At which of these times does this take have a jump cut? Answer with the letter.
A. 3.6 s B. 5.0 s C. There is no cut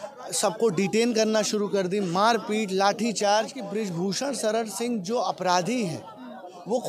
A